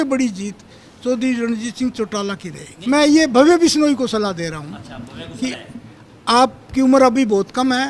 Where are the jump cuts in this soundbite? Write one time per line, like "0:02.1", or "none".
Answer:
0:02.7